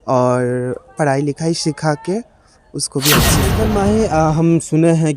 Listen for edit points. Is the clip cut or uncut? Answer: cut